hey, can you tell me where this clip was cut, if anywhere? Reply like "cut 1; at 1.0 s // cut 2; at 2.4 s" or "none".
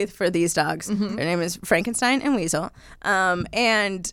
none